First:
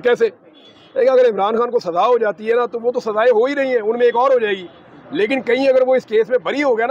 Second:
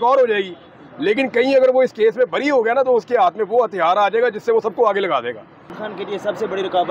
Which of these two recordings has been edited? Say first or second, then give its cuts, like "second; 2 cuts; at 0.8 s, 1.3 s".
second; 1 cut; at 5.8 s